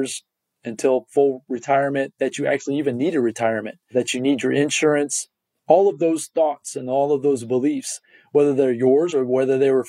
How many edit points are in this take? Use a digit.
2